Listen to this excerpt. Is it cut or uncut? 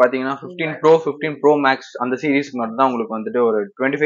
uncut